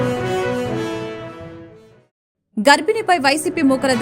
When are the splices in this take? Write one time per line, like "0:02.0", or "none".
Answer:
0:00.8
0:02.6